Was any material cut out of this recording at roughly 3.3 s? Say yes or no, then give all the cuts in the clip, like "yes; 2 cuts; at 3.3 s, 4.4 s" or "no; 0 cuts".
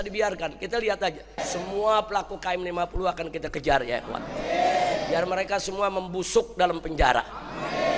no; 1 cut; at 1.4 s